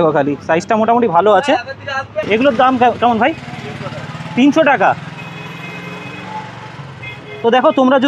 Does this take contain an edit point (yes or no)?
yes